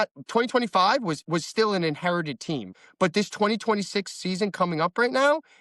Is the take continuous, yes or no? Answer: no